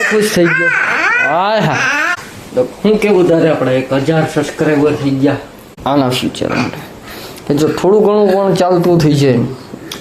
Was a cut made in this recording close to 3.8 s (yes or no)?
no